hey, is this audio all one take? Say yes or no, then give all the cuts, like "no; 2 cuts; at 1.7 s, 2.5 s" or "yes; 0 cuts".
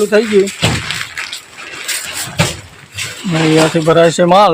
yes; 0 cuts